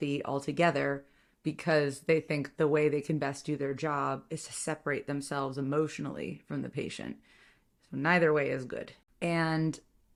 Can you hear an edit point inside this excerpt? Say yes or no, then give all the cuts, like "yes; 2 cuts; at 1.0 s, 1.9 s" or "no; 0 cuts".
no; 0 cuts